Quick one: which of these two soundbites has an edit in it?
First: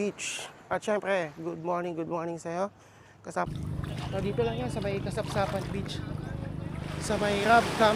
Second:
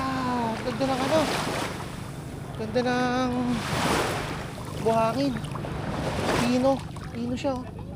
first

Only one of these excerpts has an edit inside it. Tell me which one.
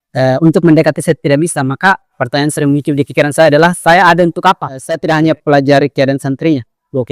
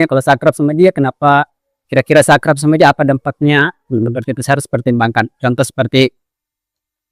first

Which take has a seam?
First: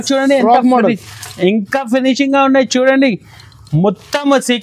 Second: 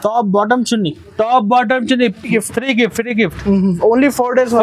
second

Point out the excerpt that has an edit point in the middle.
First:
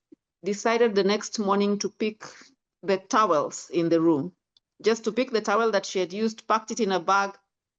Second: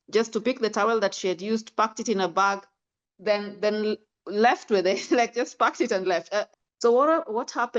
second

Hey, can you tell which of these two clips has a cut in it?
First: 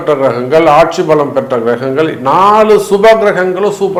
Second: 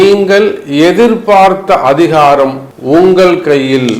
second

